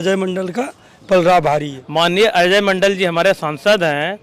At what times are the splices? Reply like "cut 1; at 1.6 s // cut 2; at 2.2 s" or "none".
cut 1; at 1.8 s